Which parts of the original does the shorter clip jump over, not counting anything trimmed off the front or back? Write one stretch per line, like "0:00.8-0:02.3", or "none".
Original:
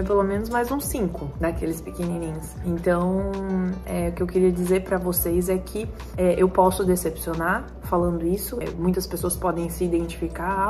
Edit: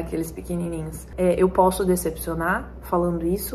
0:02.5-0:06.0

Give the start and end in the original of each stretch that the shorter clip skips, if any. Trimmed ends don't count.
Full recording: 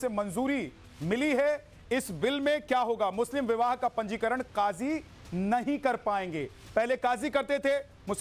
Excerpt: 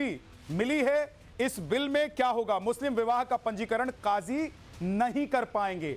none

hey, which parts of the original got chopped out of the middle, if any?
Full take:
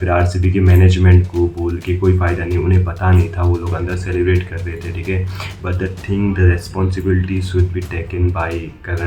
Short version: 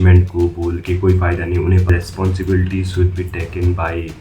0:02.9-0:06.5

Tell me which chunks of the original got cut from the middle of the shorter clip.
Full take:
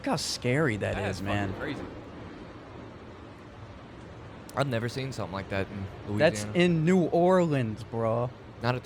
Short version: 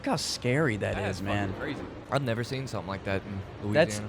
0:02.0-0:04.4

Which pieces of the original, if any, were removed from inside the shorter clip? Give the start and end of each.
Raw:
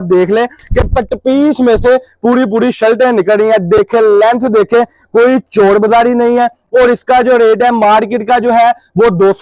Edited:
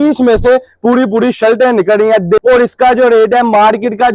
0:03.8-0:06.7

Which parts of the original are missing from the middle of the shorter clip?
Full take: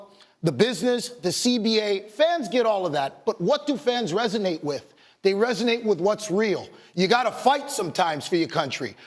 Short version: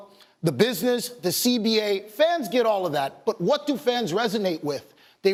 none

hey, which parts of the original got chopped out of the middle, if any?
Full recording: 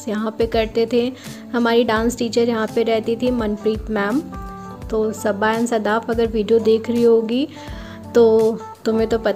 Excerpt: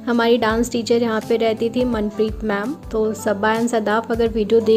0:04.2-0:04.7

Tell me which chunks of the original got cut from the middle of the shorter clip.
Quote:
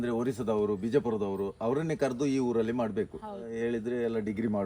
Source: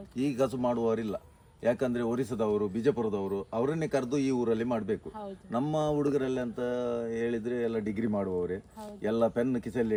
0:05.4-0:07.1

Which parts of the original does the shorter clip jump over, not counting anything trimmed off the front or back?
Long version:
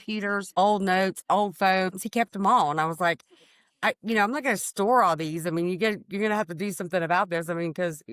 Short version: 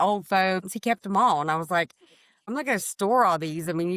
0:03.8-0:04.3

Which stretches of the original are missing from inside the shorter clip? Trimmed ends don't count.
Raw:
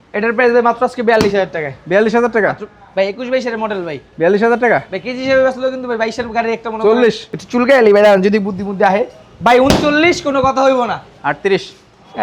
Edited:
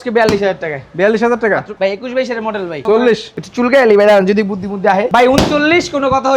0:02.6-0:02.9
0:04.0-0:06.8
0:09.0-0:09.4

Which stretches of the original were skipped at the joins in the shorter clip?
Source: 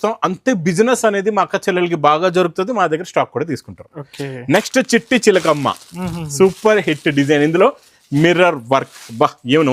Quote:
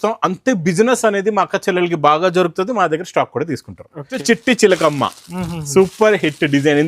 0:04.2-0:04.9

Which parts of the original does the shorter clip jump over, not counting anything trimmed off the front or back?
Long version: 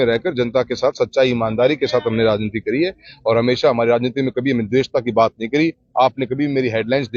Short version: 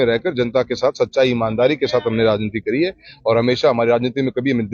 none

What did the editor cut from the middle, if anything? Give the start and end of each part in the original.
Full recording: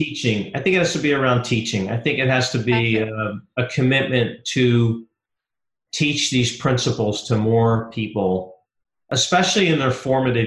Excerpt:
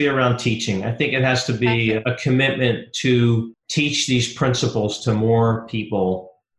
0:03.1-0:03.5
0:05.1-0:05.8

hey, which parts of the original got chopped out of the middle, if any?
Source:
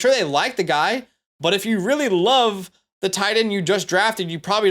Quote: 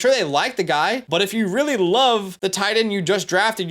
0:01.0-0:01.3
0:02.6-0:02.9

